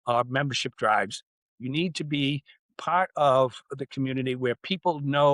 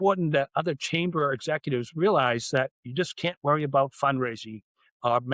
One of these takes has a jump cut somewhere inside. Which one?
second; 1 cut; at 2.8 s

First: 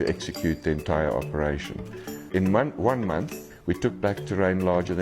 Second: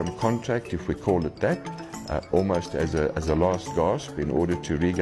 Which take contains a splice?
first; 1 cut; at 2.3 s

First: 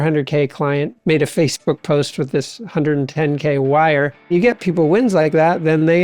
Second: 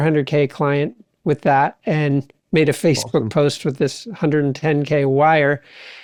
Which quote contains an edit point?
first; 2 cuts; at 0.9 s, 4.3 s

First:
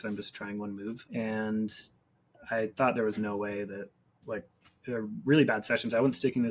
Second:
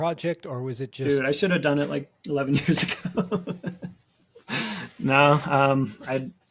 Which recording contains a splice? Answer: first; 2 cuts; at 1.0 s, 4.1 s

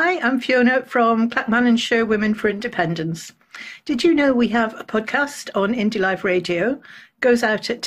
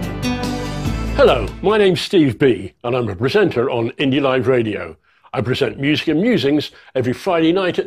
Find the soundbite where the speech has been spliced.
second; 1 cut; at 1.1 s

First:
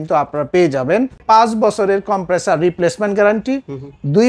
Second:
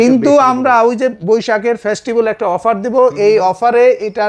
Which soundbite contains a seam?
first; 1 cut; at 1.2 s

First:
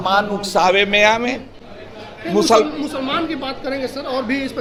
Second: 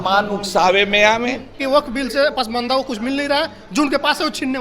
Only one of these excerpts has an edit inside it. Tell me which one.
second; 1 cut; at 1.6 s

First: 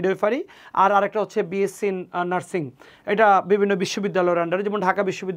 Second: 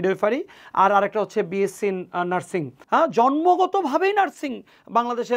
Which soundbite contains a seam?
second; 1 cut; at 2.7 s

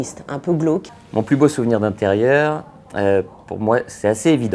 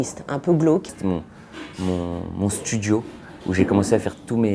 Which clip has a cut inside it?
second; 1 cut; at 1.0 s

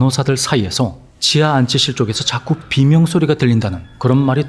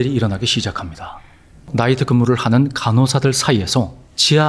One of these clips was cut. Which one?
second; 1 cut; at 1.7 s

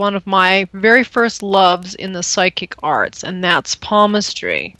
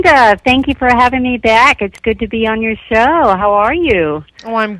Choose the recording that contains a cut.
first; 1 cut; at 1.5 s

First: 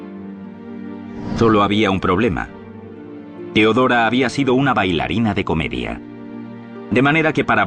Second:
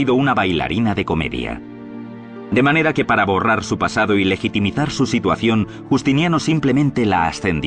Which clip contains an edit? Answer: second; 1 cut; at 4.9 s

